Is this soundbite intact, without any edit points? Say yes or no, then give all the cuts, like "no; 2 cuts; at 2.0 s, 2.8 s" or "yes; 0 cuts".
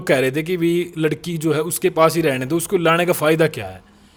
yes; 0 cuts